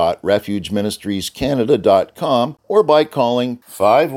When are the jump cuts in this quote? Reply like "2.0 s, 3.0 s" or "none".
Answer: 2.6 s